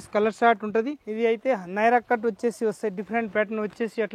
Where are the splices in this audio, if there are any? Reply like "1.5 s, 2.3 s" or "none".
1.0 s